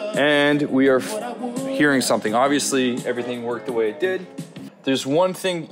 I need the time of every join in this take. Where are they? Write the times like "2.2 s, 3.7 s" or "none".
4.7 s